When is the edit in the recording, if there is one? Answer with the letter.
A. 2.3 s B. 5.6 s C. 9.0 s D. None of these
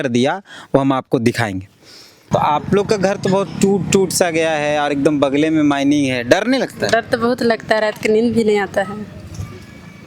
A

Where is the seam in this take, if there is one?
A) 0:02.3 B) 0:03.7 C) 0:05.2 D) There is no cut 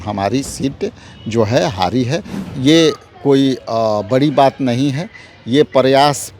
A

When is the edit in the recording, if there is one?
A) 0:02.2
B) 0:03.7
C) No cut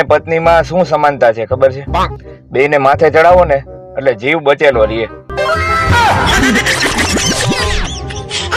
C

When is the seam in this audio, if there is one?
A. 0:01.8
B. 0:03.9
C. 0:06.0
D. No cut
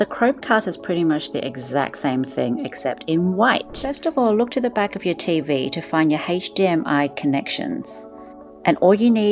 B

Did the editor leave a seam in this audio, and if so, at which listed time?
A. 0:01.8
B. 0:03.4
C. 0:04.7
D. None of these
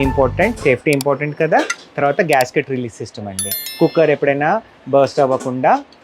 D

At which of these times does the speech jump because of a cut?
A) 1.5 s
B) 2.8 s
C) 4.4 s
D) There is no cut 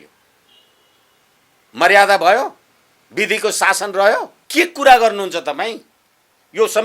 C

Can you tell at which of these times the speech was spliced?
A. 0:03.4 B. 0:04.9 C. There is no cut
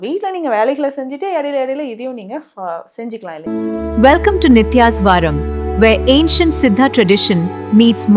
A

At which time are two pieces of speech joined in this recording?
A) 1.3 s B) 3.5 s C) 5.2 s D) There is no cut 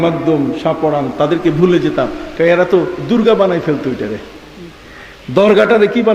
D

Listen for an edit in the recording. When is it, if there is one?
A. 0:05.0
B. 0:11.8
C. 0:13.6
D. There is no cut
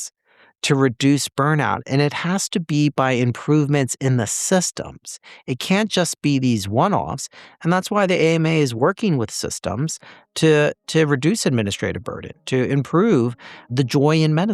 C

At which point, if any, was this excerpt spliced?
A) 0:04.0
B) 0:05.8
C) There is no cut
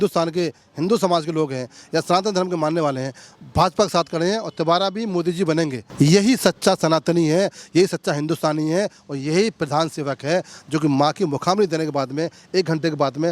B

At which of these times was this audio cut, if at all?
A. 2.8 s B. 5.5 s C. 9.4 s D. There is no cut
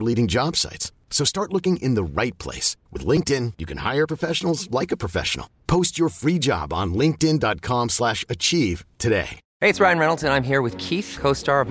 C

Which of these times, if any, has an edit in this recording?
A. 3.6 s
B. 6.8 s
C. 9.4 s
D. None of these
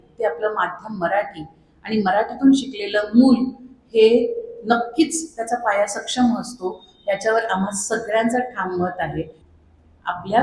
C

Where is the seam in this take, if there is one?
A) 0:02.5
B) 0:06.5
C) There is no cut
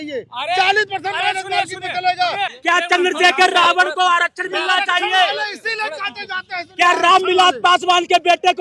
A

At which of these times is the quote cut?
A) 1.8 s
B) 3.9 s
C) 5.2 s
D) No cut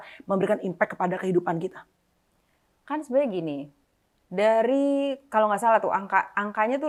D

